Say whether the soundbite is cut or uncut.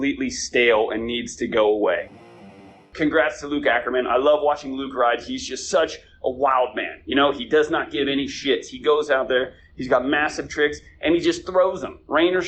cut